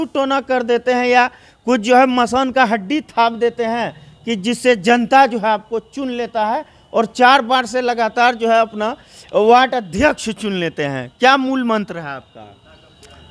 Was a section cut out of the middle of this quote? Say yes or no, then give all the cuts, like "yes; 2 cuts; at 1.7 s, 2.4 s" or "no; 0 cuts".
no; 0 cuts